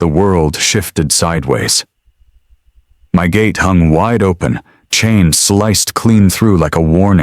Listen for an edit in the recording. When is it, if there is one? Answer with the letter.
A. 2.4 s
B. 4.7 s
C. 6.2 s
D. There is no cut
D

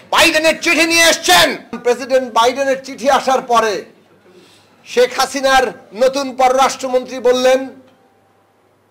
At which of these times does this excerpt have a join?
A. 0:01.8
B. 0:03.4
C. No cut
A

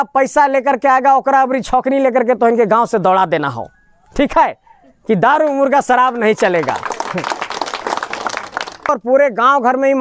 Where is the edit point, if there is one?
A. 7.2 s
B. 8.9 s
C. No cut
B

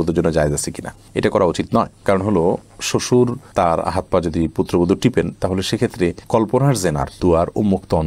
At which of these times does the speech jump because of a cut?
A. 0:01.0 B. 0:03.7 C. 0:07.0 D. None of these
D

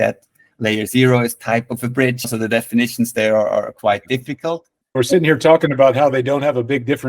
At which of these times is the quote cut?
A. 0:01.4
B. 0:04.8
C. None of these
B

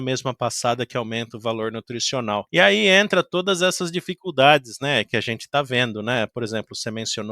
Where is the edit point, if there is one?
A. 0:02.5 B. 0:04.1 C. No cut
A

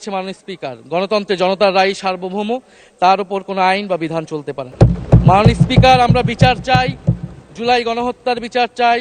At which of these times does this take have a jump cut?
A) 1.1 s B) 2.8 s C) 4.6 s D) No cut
C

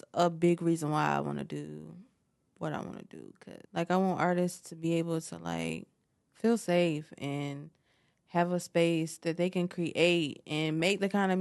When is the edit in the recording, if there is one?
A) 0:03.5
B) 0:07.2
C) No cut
A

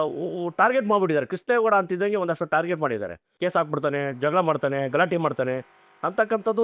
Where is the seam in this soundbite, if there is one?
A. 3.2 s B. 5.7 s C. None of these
A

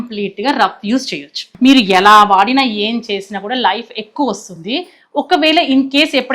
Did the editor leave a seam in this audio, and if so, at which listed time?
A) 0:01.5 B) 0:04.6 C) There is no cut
A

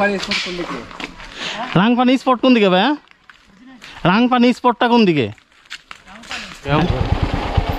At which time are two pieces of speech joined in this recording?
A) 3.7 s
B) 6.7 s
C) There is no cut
B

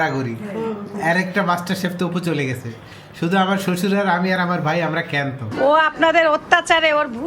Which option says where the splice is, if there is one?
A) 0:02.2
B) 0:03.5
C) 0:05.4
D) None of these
C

